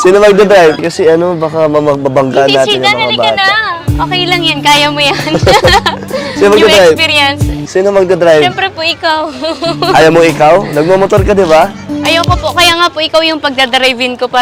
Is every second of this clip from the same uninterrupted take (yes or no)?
yes